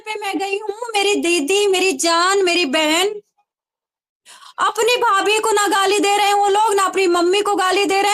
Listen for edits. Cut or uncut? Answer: uncut